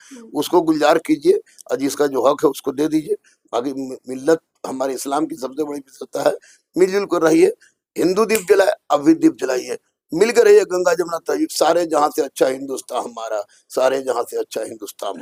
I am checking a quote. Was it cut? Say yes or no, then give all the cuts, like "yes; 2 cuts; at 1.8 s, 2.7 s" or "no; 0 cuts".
no; 0 cuts